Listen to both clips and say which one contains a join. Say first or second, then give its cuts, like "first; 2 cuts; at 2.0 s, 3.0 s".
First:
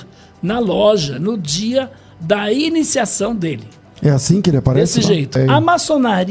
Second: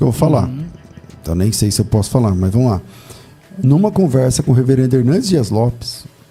first; 1 cut; at 5.4 s